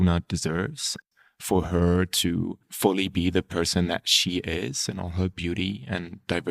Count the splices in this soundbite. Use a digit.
2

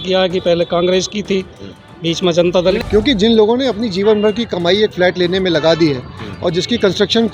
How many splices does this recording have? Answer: 1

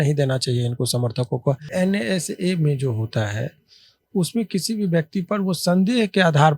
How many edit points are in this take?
1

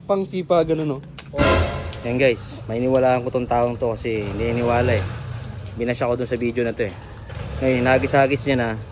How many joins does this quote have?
1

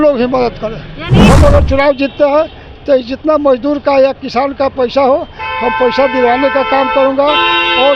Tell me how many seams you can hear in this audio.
1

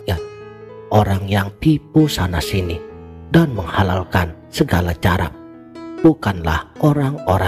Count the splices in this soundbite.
1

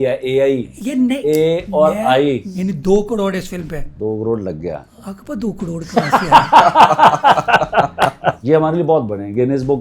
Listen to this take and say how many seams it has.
3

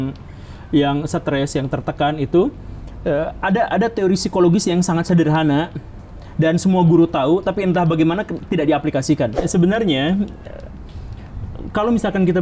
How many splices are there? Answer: 1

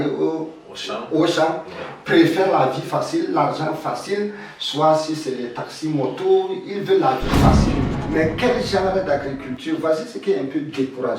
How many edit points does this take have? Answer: 1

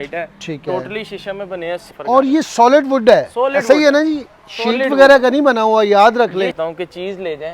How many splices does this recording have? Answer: 2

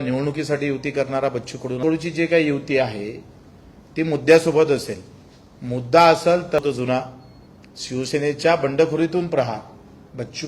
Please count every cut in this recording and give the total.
2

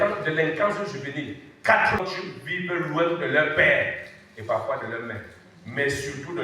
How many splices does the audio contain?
1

